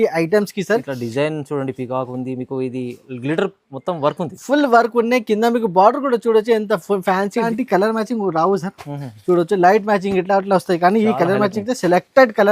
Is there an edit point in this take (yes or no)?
yes